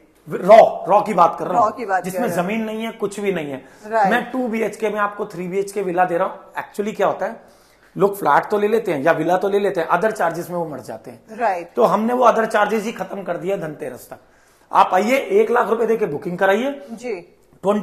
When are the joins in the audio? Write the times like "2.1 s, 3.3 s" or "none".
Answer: none